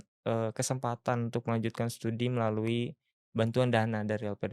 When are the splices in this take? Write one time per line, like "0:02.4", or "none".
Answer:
none